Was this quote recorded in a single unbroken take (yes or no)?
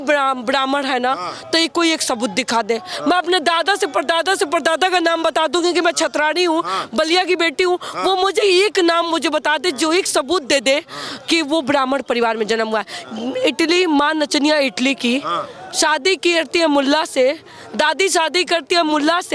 yes